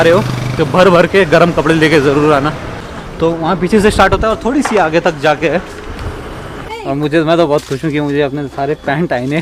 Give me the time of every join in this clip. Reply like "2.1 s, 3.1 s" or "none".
2.8 s, 6.7 s